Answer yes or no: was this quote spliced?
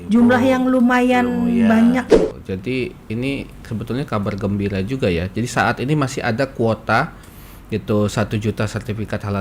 yes